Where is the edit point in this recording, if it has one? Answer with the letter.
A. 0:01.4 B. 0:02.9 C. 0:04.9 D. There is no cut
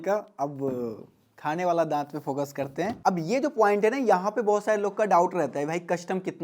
B